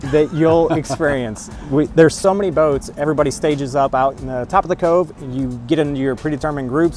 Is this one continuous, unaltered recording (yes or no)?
yes